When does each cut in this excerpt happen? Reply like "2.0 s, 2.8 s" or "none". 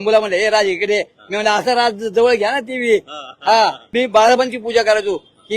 3.9 s